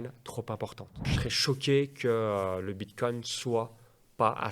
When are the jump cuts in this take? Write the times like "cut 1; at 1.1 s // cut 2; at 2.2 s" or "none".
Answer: cut 1; at 1.2 s